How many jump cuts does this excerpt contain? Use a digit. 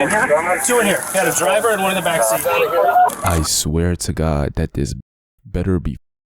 1